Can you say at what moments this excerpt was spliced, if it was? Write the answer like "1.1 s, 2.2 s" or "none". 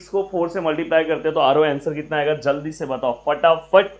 none